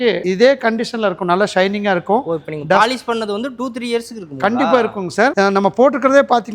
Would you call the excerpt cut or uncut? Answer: uncut